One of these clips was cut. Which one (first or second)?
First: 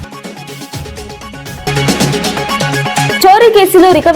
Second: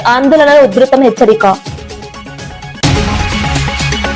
first